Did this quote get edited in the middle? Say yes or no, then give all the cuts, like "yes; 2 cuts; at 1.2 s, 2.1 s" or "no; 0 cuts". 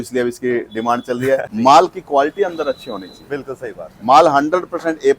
yes; 1 cut; at 1.5 s